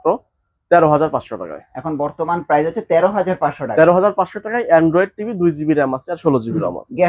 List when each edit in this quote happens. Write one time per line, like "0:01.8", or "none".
none